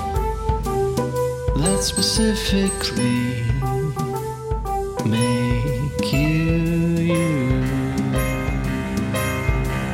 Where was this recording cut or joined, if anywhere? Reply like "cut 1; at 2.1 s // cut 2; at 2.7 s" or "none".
none